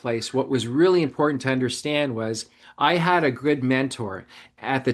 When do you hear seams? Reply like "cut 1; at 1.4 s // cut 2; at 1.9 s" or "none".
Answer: none